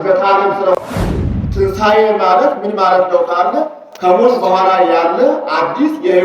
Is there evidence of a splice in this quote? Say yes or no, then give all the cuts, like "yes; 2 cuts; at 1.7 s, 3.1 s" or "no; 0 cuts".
no; 0 cuts